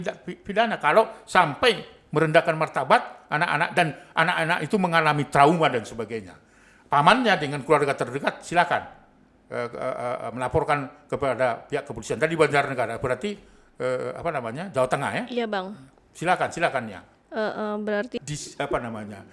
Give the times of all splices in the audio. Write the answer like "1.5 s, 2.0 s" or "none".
18.1 s